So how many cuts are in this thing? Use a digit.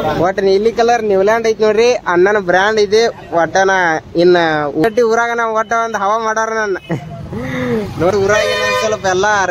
2